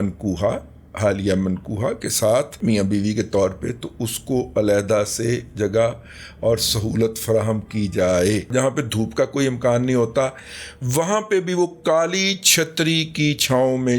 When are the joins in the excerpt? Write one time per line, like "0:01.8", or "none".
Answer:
0:02.6
0:08.5